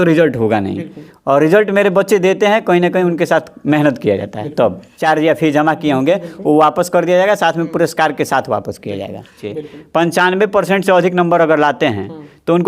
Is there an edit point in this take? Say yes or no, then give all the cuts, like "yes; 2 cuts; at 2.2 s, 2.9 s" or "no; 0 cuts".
yes; 2 cuts; at 4.9 s, 9.4 s